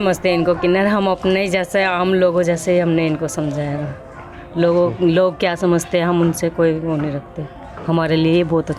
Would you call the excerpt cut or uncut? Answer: uncut